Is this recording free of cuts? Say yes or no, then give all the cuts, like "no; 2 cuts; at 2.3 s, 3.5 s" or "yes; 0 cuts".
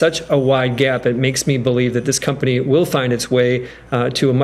yes; 0 cuts